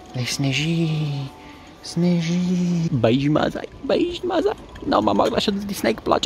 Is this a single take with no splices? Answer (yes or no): no